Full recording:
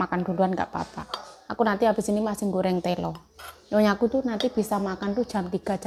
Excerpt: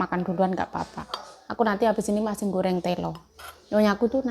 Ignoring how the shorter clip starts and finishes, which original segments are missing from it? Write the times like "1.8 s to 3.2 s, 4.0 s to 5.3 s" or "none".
none